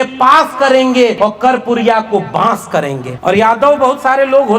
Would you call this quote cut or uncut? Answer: cut